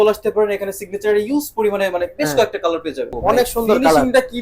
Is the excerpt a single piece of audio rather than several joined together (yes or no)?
no